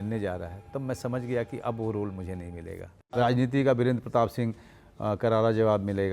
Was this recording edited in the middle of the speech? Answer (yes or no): yes